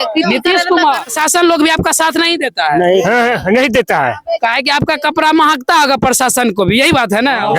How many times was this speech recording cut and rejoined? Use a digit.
1